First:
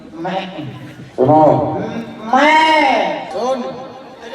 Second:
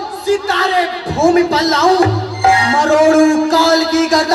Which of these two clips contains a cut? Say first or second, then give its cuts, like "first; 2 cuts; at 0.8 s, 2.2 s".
first; 1 cut; at 3.2 s